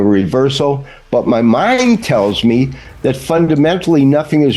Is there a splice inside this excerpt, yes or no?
no